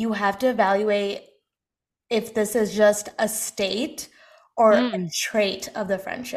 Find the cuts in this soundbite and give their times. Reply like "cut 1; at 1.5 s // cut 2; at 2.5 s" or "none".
none